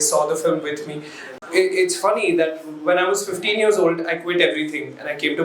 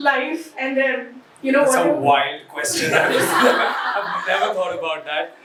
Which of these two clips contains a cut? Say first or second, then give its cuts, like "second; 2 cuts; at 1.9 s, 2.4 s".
first; 1 cut; at 1.3 s